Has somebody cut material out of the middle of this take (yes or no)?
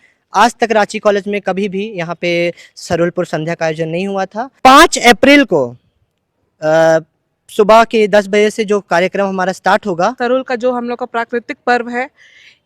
yes